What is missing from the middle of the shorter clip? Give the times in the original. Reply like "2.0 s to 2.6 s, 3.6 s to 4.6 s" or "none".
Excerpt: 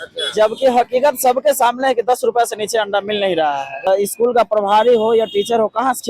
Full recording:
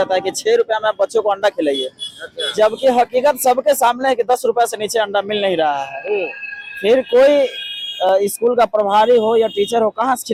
6.1 s to 8.1 s